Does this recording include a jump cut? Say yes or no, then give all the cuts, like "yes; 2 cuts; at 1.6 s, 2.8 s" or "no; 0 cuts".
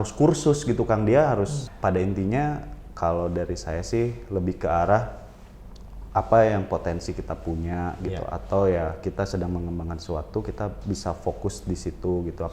yes; 1 cut; at 1.7 s